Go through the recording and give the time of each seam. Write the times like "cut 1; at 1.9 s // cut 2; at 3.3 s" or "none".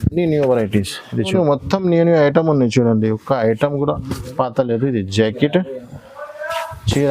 cut 1; at 1.3 s